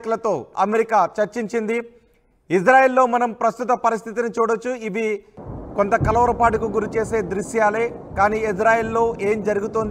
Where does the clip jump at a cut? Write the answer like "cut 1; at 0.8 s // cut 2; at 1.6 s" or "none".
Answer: none